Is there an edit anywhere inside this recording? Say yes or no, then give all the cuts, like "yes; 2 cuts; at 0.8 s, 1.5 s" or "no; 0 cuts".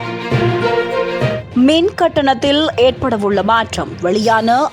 no; 0 cuts